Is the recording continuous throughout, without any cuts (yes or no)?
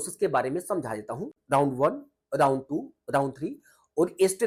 yes